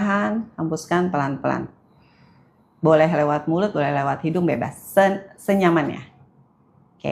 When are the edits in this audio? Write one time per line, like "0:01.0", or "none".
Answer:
none